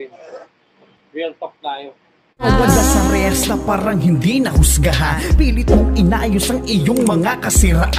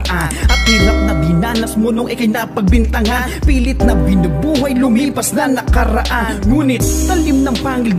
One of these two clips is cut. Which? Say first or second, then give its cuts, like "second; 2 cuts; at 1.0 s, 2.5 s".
first; 1 cut; at 2.4 s